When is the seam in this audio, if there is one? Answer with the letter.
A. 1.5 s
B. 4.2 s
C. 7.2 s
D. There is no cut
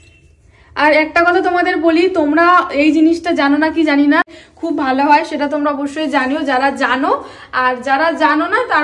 B